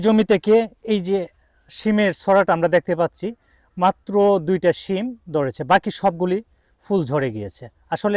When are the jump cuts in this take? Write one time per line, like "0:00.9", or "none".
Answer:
none